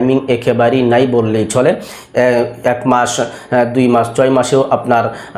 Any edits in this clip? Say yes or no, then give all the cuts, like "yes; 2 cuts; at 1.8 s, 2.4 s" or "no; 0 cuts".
no; 0 cuts